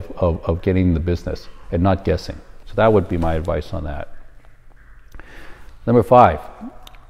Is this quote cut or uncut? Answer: uncut